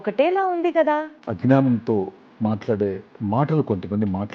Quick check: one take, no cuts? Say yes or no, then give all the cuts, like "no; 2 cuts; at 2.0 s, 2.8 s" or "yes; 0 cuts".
no; 2 cuts; at 1.2 s, 3.1 s